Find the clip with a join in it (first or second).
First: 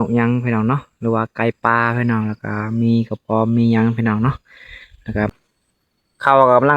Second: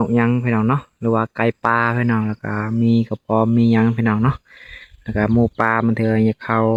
first